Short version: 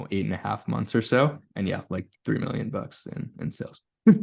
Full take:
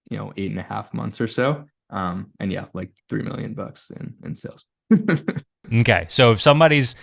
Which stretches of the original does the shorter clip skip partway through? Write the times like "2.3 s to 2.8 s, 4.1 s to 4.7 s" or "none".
1.7 s to 2.3 s